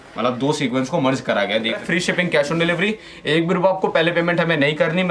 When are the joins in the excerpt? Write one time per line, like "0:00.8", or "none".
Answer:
0:01.8

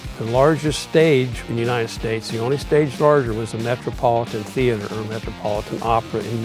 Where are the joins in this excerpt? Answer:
0:01.4

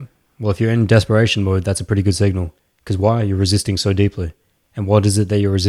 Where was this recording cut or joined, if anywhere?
none

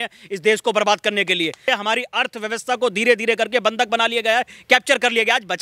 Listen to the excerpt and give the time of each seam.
0:01.6

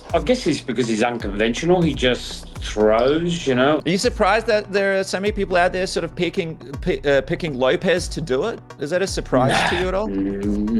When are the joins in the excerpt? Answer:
0:03.8

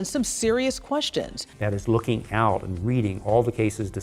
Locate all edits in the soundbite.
0:01.5

